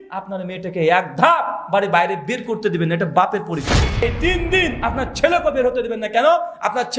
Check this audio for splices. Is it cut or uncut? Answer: cut